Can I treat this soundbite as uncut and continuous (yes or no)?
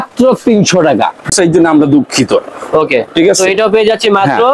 no